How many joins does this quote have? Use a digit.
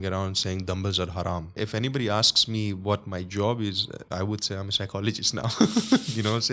1